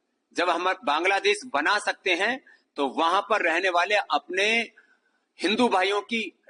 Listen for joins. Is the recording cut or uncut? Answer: uncut